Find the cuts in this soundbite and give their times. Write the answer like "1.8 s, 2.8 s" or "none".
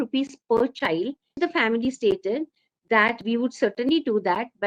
1.3 s